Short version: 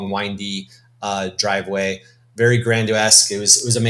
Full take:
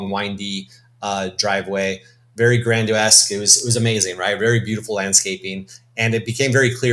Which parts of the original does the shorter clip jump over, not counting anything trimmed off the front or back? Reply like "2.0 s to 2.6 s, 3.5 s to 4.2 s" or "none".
none